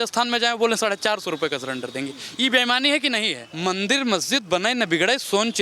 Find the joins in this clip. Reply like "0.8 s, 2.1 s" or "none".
3.4 s